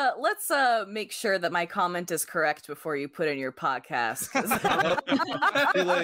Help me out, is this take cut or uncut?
uncut